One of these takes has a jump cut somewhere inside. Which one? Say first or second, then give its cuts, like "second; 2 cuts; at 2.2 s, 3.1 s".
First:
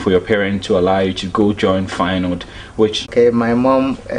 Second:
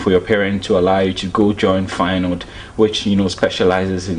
first; 1 cut; at 3.1 s